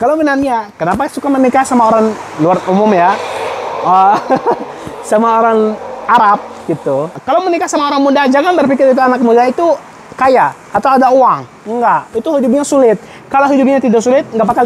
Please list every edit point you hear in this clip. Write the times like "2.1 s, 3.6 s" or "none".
7.2 s